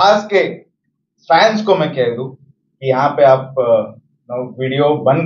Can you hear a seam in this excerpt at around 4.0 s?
no; 0 cuts

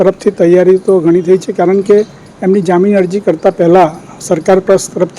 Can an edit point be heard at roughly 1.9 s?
no; 0 cuts

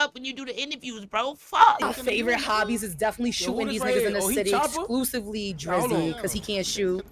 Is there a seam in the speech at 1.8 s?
yes; 1 cut; at 1.8 s

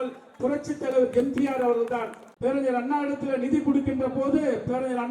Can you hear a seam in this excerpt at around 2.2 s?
yes; 1 cut; at 2.2 s

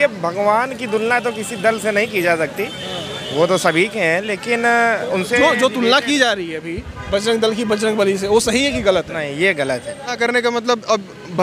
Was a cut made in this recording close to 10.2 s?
yes; 1 cut; at 10.2 s

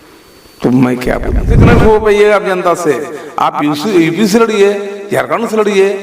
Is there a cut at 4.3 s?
no; 1 cut; at 1.6 s

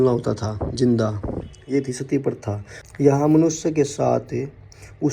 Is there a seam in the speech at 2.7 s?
yes; 1 cut; at 2.7 s

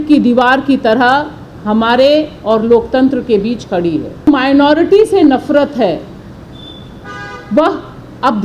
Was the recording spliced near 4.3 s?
yes; 1 cut; at 4.3 s

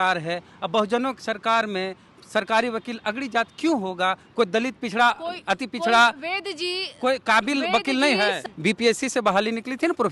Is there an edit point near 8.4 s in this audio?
yes; 1 cut; at 8.4 s

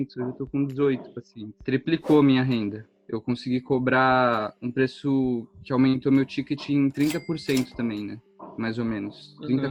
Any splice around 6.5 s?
no; 0 cuts

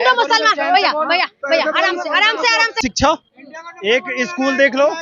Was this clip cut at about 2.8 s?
yes; 1 cut; at 2.8 s

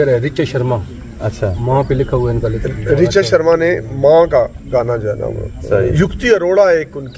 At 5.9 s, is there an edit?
yes; 1 cut; at 5.9 s

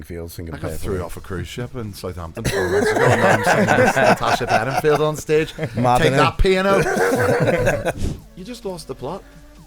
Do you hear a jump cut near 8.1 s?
yes; 1 cut; at 8.1 s

